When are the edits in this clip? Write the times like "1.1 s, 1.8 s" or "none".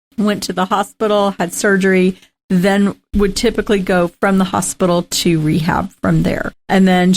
3.0 s